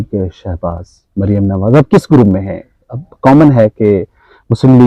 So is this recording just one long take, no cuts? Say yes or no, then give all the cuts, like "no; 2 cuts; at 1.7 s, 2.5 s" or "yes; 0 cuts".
yes; 0 cuts